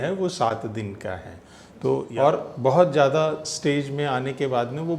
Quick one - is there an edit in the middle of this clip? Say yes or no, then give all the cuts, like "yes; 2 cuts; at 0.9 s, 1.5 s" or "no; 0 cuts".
yes; 1 cut; at 2.1 s